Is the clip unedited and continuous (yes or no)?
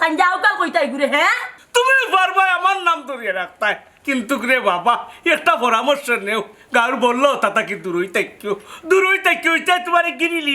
no